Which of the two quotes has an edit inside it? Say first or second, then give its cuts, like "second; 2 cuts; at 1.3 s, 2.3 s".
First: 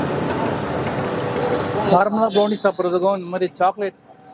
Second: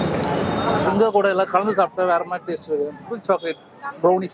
second; 2 cuts; at 0.9 s, 3.0 s